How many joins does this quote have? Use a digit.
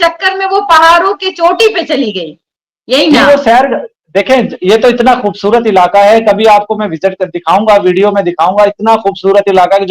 0